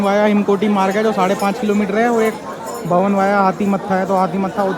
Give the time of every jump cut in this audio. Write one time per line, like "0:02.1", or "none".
none

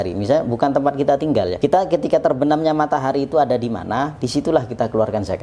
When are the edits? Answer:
0:01.5

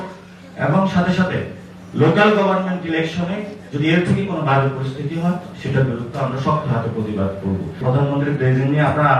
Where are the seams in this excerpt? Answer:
0:07.8

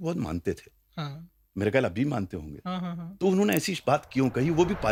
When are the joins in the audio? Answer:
none

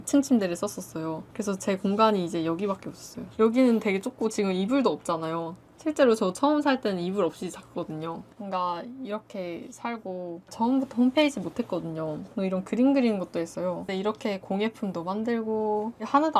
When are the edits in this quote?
none

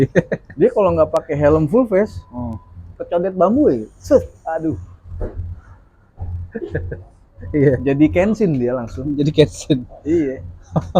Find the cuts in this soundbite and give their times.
none

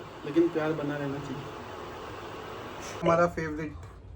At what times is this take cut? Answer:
0:03.0

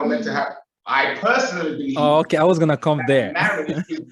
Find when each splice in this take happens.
none

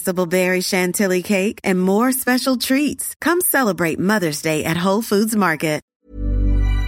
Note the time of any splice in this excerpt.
0:05.9

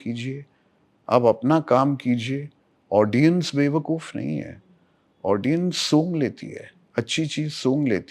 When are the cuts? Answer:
none

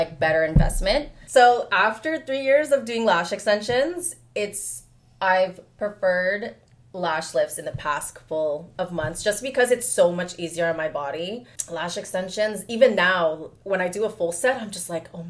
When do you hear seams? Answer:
0:01.2
0:11.5

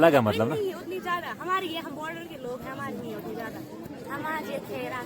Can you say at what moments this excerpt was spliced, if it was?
0:03.8

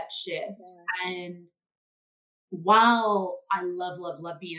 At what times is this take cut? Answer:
none

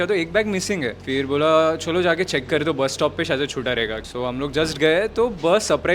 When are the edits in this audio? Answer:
0:01.0
0:04.0

